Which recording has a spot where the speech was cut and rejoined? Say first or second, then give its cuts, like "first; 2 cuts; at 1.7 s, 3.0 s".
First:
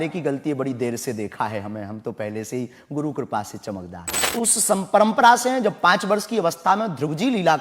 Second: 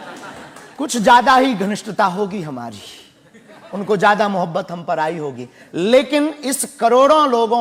first; 1 cut; at 4.3 s